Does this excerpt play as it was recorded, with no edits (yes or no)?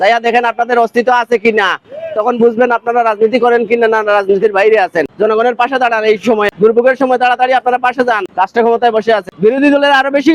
no